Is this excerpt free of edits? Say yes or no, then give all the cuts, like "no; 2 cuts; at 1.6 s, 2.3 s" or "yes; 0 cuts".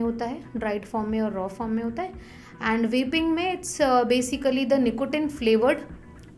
yes; 0 cuts